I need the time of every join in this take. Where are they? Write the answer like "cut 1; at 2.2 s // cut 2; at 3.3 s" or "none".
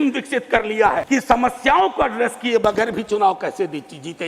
cut 1; at 1.0 s